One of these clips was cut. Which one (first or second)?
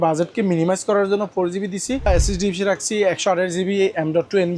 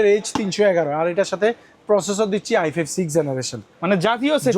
first